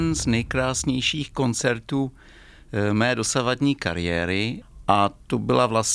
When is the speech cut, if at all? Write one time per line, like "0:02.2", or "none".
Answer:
0:04.6